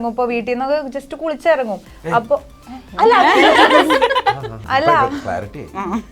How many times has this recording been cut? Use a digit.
1